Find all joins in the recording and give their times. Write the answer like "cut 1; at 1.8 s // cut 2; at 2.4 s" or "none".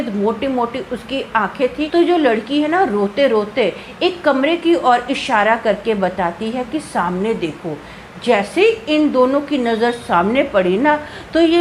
cut 1; at 1.8 s